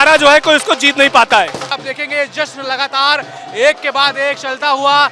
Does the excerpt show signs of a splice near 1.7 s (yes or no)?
yes